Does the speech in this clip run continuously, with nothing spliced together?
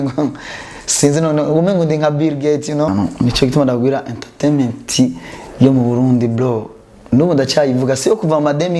no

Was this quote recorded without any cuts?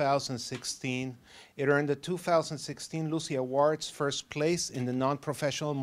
yes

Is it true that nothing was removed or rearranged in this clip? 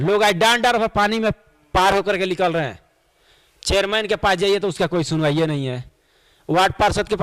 yes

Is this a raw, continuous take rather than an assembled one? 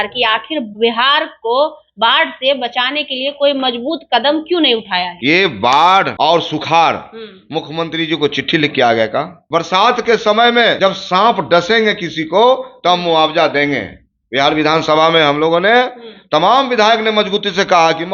no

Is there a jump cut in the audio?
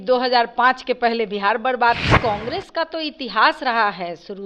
yes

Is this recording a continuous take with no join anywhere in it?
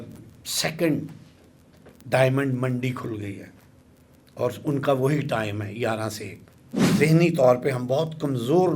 no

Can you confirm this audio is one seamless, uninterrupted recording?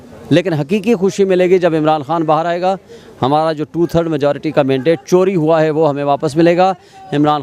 yes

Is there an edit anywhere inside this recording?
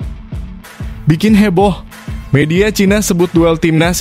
yes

